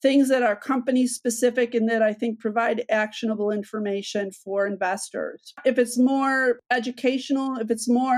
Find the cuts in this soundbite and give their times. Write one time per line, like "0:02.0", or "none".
0:05.5
0:06.6